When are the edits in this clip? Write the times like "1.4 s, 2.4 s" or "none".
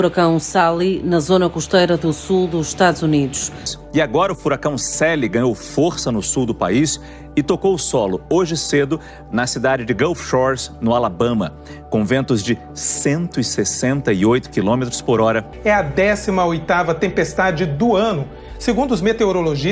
3.7 s, 15.5 s